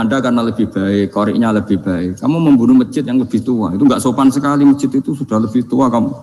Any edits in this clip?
no; 0 cuts

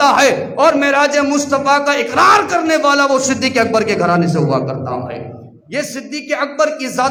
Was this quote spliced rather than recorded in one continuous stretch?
no; 0 cuts

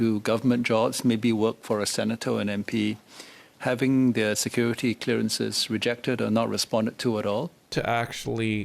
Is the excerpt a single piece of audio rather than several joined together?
no; 1 cut; at 7.7 s

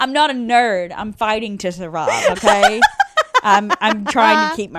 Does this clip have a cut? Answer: no; 0 cuts

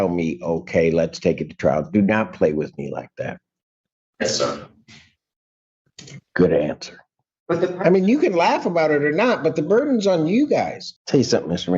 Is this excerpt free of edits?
no; 2 cuts; at 7.4 s, 10.8 s

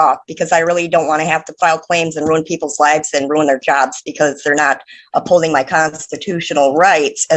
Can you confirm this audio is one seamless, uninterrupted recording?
yes; 0 cuts

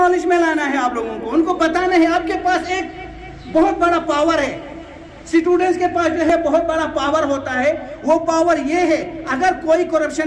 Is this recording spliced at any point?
no; 0 cuts

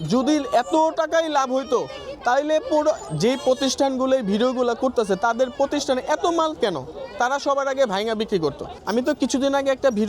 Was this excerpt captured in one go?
no; 1 cut; at 8.7 s

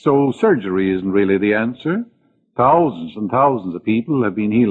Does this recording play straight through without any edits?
yes; 0 cuts

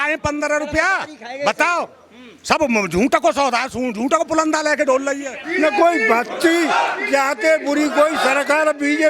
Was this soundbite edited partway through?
yes; 1 cut; at 5.4 s

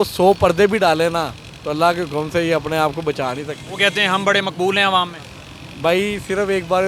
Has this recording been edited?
no; 0 cuts

